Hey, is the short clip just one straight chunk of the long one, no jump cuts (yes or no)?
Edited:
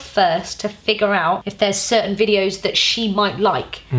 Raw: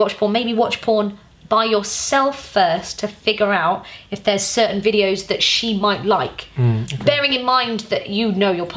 no